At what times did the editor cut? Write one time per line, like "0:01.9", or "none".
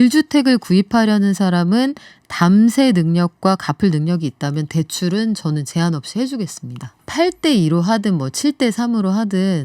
0:07.0

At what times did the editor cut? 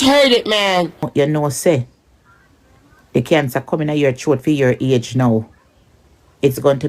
0:01.0

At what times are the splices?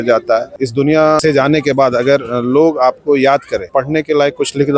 0:00.9
0:03.7

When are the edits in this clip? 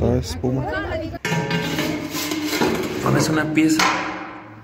0:01.1

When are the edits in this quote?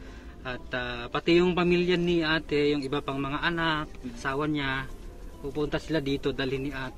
0:04.2

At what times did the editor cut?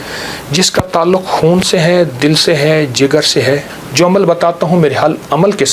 0:03.8

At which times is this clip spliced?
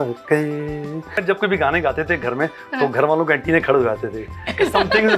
0:01.2

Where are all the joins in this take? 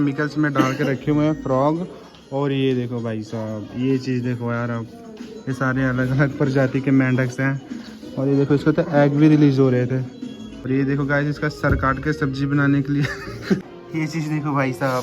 0:10.6
0:13.7

